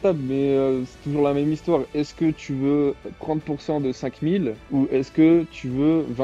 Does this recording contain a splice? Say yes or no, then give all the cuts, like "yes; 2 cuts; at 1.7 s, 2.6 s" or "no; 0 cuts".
no; 0 cuts